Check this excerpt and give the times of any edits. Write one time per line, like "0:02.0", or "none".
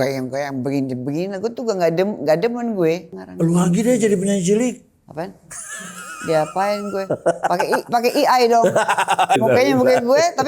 0:03.2
0:09.4

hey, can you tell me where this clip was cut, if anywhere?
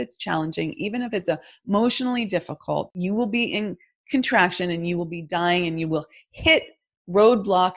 0:02.9

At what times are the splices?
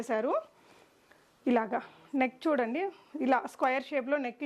none

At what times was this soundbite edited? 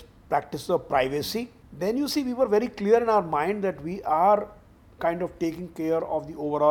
0:01.6

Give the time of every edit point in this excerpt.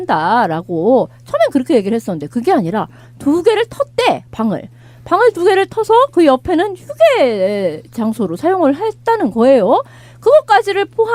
none

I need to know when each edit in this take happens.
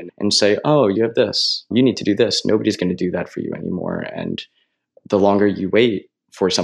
none

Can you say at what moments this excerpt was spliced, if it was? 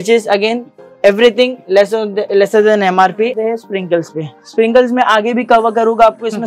0:03.4

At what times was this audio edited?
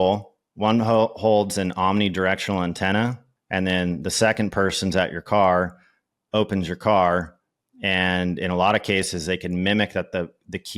0:03.3

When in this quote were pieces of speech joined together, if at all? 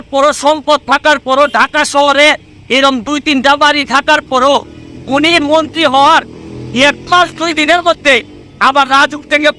none

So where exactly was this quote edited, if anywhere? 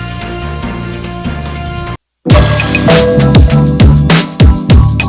0:00.8
0:01.9

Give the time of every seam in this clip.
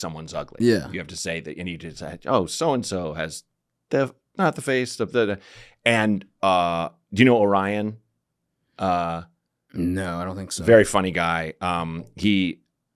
none

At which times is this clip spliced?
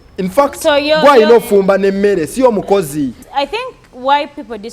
0:03.2

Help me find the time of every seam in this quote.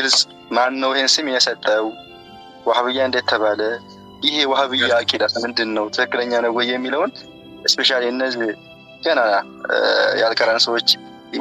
none

